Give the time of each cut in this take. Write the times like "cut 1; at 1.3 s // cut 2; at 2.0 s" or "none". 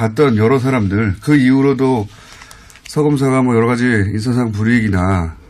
none